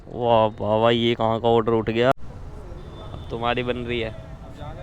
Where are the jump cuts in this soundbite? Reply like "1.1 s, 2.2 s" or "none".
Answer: 2.1 s